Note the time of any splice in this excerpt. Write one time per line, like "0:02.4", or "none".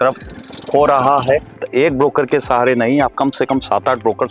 0:01.6

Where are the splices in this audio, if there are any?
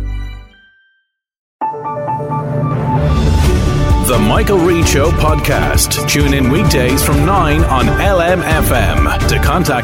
0:01.5

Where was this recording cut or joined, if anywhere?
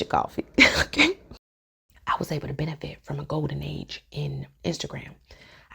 0:01.5
0:04.5

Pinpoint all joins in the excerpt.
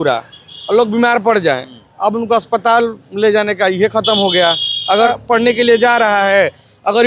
0:05.1

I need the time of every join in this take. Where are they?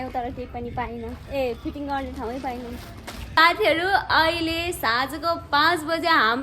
0:03.3

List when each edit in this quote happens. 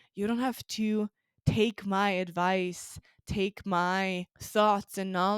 0:04.3

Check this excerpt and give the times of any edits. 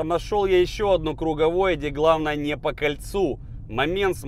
none

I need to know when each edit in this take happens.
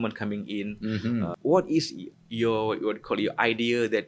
0:01.4

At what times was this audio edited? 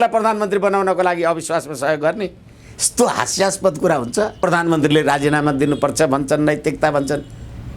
0:04.4

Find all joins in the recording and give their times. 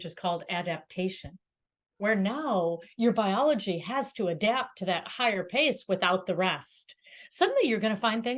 none

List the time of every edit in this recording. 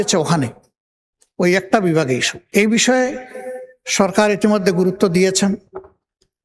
0:02.3

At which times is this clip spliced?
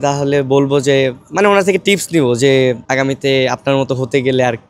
0:02.8

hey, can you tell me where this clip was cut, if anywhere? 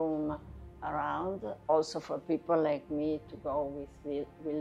none

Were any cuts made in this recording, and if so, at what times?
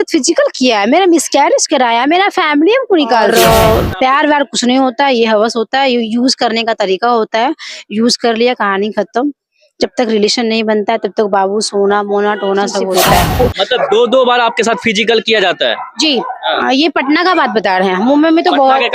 0:03.3
0:12.9

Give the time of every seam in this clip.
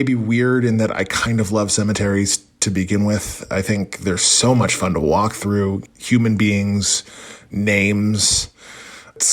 none

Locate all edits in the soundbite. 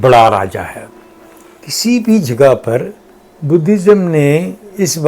0:01.6

